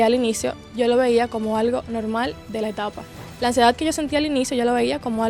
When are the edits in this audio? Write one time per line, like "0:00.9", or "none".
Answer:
none